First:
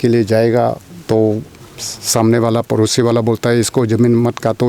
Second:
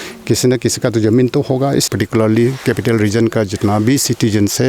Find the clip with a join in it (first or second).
second